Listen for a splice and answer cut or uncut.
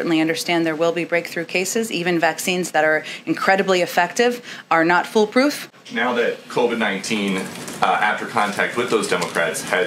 cut